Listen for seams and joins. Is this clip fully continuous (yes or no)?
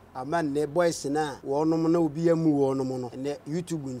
no